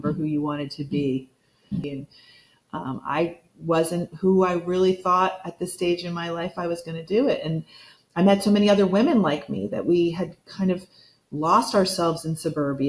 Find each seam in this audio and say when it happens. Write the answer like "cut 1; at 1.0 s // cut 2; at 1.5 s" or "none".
cut 1; at 1.9 s